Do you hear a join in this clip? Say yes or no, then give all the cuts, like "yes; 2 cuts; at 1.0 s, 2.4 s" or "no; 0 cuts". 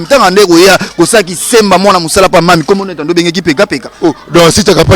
no; 0 cuts